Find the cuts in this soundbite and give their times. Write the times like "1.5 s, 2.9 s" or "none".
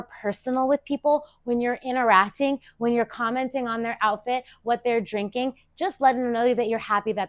none